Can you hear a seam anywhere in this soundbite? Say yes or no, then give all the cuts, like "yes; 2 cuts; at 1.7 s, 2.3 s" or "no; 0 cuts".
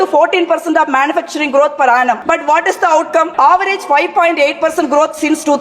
yes; 2 cuts; at 2.2 s, 3.3 s